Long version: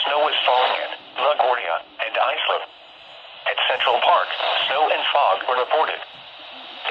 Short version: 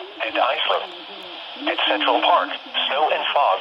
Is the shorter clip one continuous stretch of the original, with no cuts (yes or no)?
yes